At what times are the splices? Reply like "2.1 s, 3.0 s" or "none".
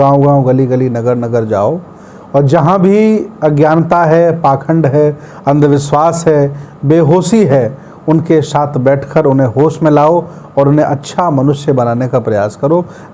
none